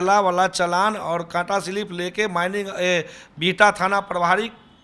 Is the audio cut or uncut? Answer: uncut